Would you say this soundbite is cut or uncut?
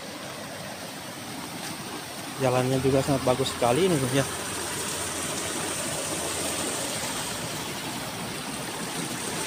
uncut